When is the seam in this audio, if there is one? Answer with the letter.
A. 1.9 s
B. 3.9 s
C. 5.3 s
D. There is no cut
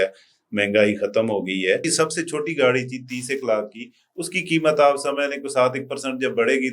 A